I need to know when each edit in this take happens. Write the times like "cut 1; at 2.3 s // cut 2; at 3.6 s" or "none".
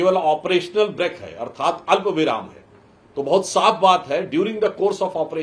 none